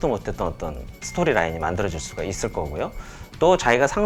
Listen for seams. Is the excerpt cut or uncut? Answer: uncut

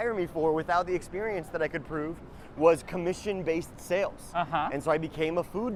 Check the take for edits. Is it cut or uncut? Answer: uncut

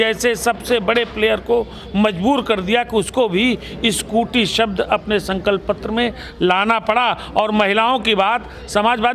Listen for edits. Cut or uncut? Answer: uncut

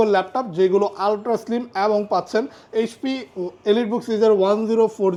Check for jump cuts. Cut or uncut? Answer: uncut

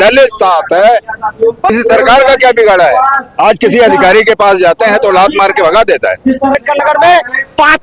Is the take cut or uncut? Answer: cut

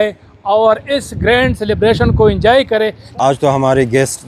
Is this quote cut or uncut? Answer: cut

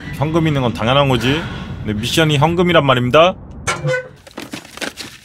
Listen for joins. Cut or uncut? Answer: uncut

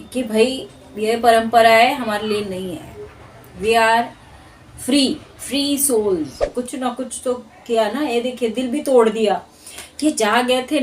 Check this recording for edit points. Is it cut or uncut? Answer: cut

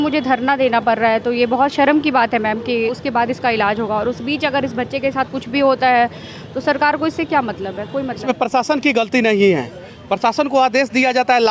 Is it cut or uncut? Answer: cut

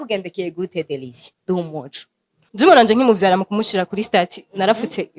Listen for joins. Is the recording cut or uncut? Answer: cut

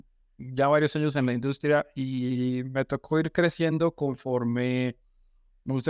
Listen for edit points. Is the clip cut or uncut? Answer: uncut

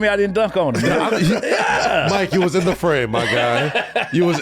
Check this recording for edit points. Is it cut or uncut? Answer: uncut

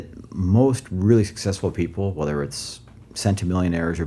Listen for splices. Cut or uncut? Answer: uncut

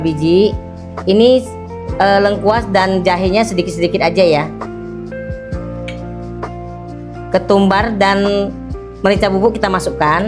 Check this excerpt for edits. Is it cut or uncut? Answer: uncut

